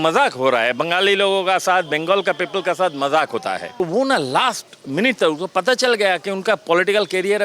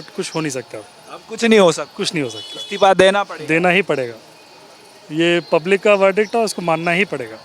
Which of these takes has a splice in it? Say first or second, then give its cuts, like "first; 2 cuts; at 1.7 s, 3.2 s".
first; 1 cut; at 3.8 s